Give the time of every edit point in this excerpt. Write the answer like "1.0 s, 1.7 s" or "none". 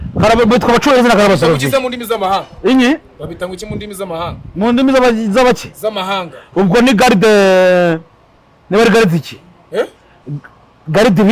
none